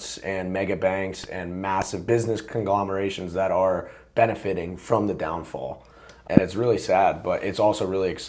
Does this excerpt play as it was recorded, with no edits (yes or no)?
no